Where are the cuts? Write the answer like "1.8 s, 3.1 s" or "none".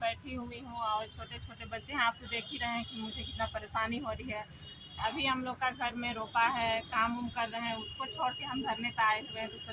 none